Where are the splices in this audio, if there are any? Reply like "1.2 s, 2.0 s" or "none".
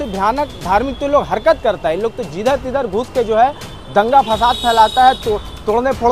none